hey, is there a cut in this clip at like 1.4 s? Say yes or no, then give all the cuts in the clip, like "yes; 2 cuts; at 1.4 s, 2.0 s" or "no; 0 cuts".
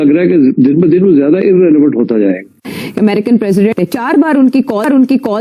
no; 2 cuts; at 2.8 s, 3.7 s